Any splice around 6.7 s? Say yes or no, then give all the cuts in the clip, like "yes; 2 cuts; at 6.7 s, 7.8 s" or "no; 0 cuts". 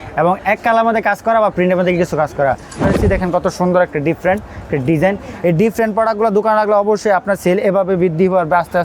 no; 1 cut; at 2.9 s